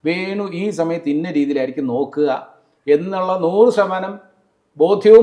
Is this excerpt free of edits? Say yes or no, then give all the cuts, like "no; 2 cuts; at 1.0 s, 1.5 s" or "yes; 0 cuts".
yes; 0 cuts